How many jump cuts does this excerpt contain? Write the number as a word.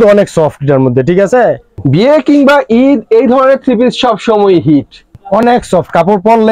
two